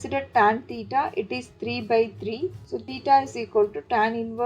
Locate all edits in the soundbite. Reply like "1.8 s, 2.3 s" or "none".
2.7 s